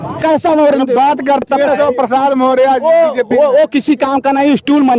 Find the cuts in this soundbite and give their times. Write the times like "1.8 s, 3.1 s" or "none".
1.4 s